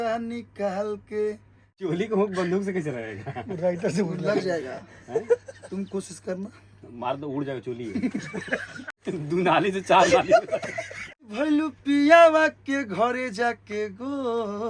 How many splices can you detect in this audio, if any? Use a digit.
3